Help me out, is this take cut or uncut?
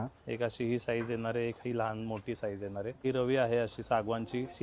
cut